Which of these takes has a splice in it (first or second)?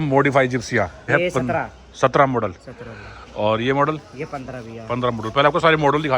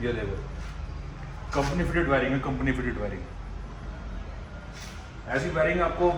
first